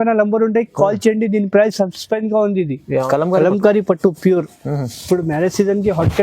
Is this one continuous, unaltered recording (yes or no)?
no